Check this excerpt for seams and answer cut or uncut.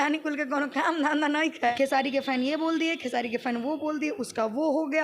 cut